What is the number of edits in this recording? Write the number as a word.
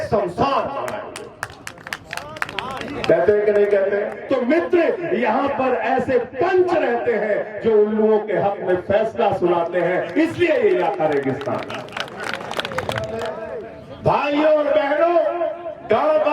two